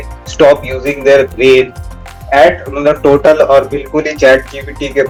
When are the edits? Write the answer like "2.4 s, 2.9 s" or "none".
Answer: none